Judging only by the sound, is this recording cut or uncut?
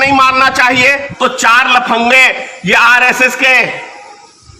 cut